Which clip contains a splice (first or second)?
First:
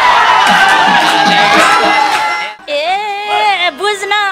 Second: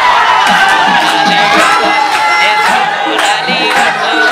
first